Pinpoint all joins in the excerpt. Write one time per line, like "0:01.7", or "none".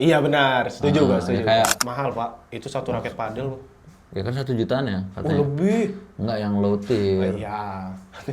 0:01.8